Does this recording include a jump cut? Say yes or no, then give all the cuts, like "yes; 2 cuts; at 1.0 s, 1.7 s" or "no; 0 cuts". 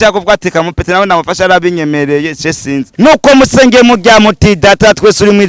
yes; 1 cut; at 2.9 s